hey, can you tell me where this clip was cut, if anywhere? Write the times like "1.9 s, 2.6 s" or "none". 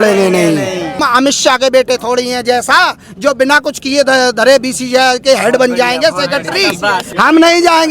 1.0 s, 7.1 s